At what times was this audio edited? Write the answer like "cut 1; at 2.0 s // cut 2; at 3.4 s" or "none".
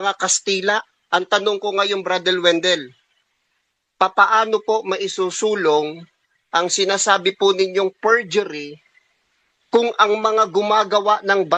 cut 1; at 1.0 s